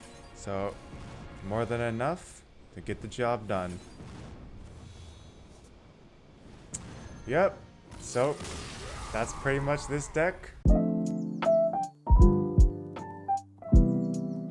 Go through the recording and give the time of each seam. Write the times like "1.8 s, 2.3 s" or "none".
10.5 s